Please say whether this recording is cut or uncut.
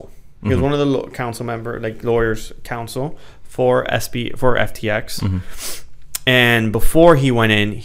uncut